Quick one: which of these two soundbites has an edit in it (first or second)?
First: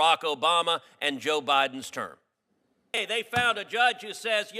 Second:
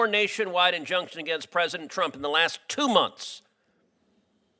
first